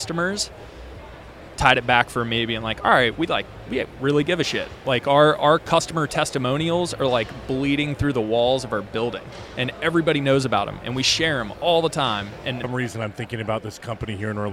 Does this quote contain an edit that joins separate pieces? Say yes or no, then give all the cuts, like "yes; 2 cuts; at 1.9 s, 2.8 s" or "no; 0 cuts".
yes; 1 cut; at 12.6 s